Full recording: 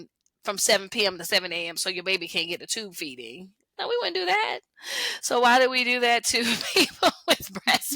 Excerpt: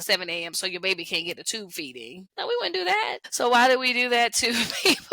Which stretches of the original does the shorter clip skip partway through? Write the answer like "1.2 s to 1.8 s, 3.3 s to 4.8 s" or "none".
3.4 s to 3.6 s, 4.6 s to 5.1 s